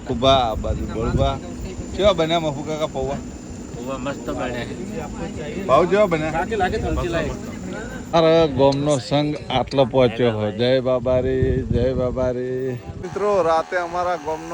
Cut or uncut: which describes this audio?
cut